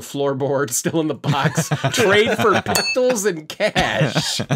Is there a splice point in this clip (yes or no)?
no